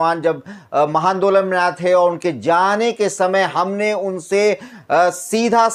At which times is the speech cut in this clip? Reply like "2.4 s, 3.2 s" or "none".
none